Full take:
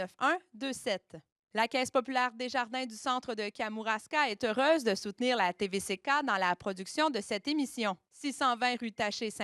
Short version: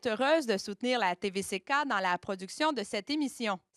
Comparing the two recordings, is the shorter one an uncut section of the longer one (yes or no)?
yes